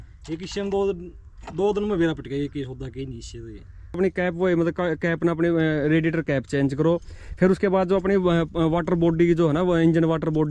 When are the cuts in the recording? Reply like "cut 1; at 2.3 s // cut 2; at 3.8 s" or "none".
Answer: cut 1; at 4.0 s